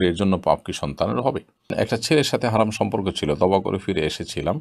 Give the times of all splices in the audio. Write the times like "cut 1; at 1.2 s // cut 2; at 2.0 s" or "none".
cut 1; at 1.7 s